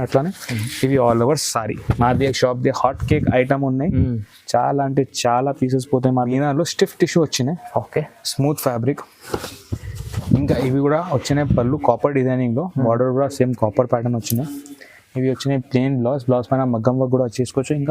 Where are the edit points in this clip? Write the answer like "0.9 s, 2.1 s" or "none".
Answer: 6.3 s